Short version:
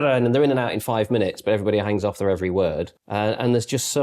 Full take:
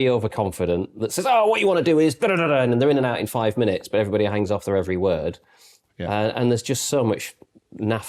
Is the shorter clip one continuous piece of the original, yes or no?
no